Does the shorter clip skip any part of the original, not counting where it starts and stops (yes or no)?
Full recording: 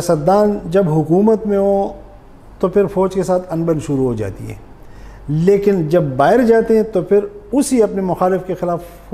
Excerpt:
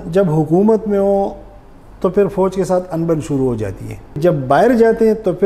yes